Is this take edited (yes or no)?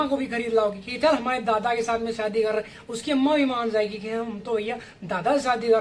no